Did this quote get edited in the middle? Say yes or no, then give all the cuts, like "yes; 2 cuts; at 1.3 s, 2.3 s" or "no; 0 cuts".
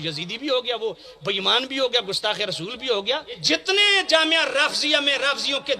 yes; 1 cut; at 3.4 s